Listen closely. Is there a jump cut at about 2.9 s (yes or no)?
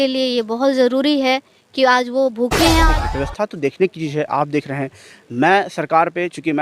yes